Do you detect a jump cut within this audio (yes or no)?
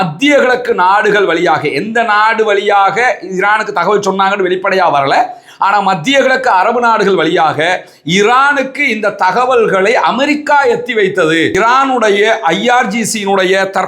yes